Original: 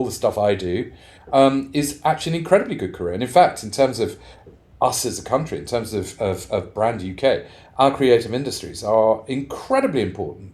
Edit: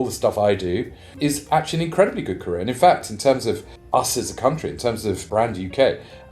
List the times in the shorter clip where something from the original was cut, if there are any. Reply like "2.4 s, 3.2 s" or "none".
1.1 s, 3.7 s, 5.2 s